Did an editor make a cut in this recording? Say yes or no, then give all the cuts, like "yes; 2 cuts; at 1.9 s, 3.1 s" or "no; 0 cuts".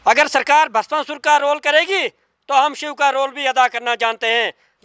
no; 0 cuts